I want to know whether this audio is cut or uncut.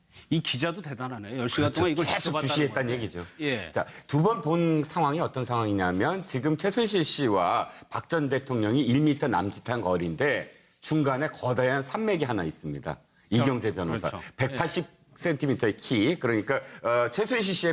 uncut